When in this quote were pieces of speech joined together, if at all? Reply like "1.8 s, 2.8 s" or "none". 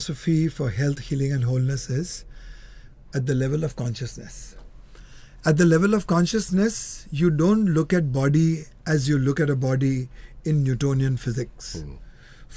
none